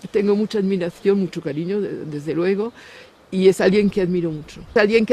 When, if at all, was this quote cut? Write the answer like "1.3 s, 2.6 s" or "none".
2.7 s

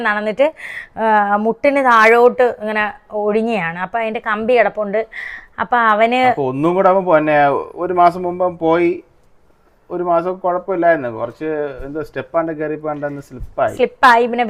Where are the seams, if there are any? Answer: none

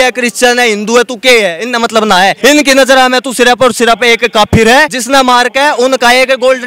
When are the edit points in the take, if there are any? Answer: 2.4 s, 5.0 s

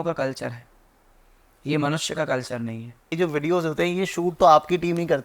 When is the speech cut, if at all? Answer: 3.1 s

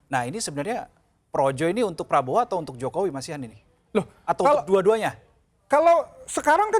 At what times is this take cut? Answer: none

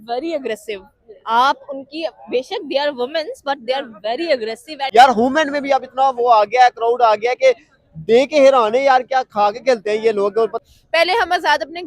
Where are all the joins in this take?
4.9 s, 10.6 s

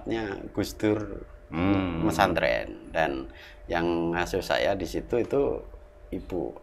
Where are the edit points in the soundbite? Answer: none

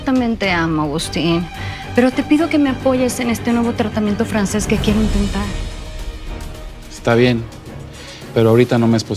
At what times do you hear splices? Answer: 1.5 s

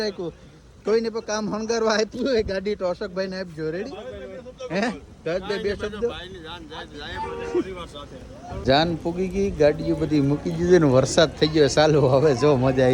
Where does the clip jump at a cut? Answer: none

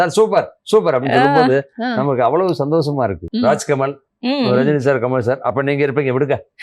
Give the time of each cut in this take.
3.2 s

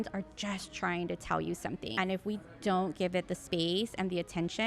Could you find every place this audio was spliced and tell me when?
1.9 s

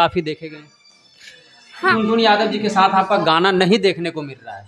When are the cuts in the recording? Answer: 1.9 s

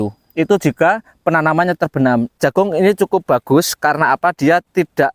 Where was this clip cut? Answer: 2.4 s

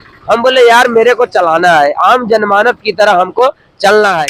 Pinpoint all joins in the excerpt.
none

